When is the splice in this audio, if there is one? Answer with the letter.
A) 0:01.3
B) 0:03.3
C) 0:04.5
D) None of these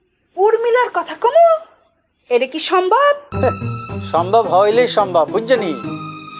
B